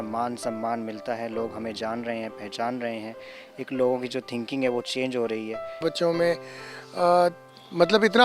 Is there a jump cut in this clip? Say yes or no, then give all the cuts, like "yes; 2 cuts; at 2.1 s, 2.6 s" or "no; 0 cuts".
yes; 1 cut; at 5.8 s